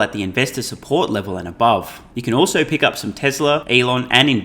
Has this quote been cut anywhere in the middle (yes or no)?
yes